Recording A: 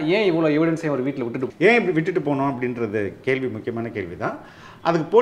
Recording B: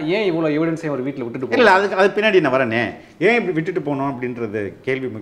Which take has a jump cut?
A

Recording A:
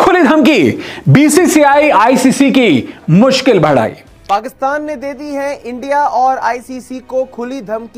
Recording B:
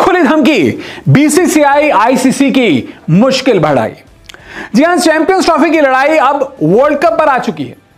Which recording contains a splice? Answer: A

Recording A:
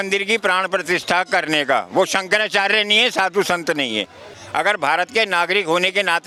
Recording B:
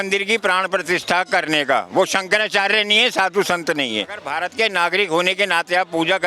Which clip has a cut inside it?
B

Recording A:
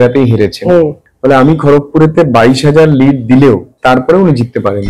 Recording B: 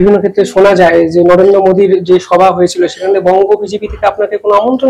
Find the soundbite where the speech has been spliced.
A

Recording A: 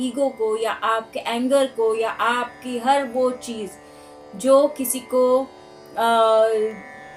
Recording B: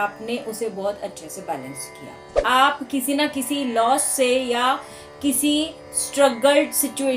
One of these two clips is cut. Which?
B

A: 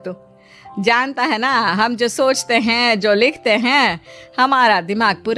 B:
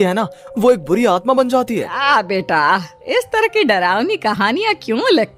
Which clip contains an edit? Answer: B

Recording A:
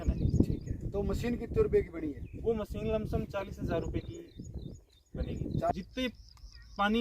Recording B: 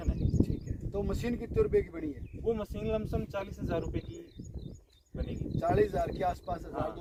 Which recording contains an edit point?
A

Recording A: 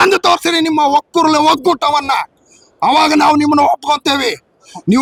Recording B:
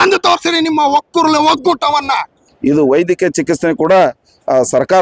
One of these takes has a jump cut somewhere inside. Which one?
B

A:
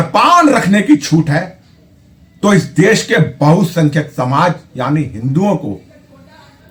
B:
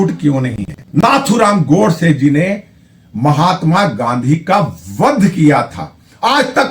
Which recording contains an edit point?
B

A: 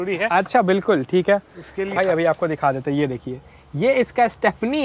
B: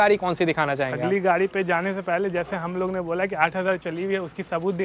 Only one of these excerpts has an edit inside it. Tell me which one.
A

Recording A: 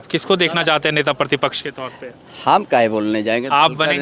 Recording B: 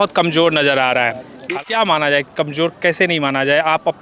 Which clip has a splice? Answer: B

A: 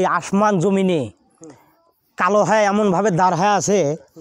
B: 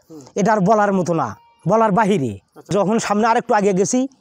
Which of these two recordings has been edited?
B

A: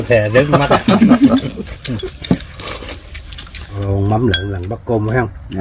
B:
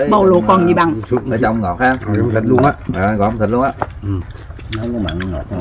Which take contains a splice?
A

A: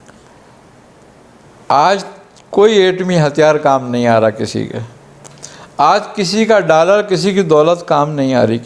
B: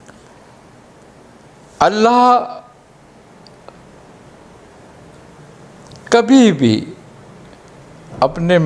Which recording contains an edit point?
A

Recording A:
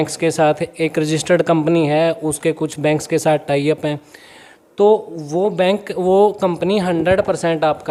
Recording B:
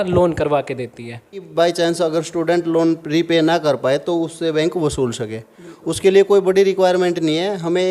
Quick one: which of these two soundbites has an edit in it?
B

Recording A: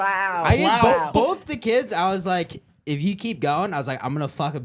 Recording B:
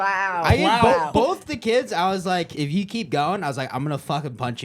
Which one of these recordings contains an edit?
B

